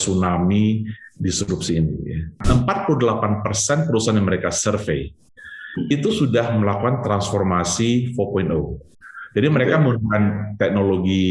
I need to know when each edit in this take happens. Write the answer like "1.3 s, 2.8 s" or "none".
2.4 s